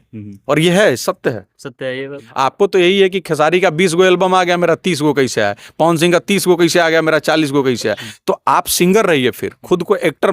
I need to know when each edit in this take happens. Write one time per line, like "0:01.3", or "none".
0:02.2